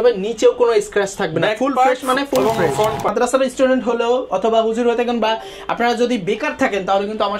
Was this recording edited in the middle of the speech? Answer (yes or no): yes